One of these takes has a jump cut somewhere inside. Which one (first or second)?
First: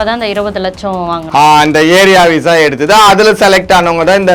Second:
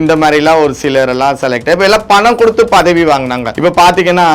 second